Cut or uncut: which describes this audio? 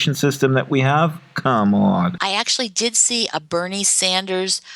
cut